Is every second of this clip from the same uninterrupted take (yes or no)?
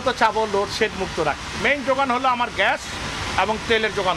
no